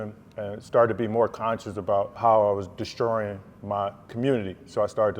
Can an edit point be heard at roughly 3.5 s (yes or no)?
no